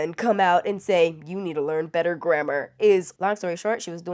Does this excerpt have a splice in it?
yes; 1 cut; at 3.1 s

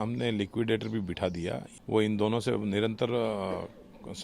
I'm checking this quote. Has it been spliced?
yes; 1 cut; at 1.7 s

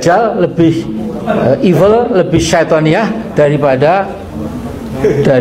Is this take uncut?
yes; 0 cuts

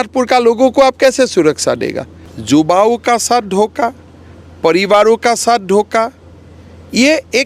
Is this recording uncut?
no; 1 cut; at 2.3 s

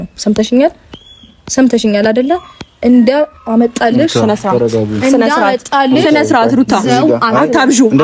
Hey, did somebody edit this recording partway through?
no; 0 cuts

